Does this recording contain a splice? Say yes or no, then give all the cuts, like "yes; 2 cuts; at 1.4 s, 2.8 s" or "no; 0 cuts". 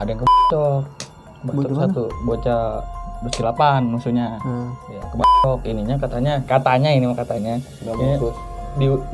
no; 0 cuts